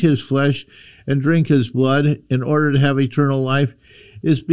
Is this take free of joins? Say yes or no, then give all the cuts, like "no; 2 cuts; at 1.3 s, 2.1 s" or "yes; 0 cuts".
yes; 0 cuts